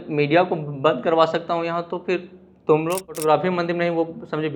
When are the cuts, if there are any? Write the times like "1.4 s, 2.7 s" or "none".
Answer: 3.2 s